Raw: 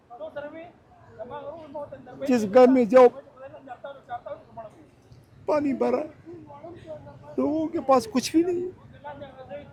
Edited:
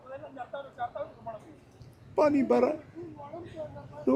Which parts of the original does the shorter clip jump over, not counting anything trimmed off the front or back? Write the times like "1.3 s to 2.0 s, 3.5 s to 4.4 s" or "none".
none